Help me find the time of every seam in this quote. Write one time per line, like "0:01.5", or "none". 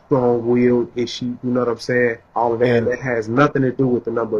0:02.2